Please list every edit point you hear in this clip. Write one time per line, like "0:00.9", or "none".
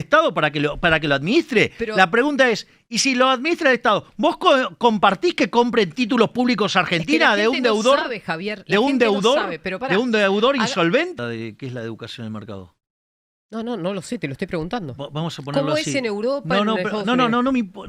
0:11.1